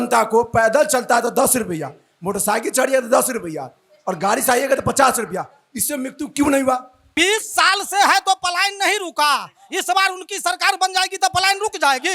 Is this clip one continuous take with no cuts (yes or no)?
no